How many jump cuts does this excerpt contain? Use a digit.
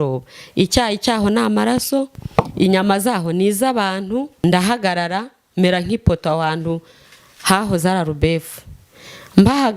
1